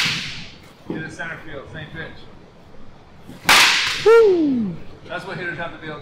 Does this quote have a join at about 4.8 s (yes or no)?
no